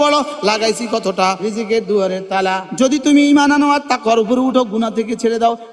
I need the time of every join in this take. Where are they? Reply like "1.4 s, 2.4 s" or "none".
1.4 s, 2.6 s